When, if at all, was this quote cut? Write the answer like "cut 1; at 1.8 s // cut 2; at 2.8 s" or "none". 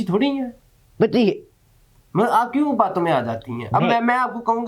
none